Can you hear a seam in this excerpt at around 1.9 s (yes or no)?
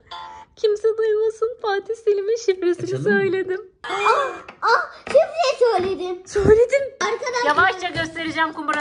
no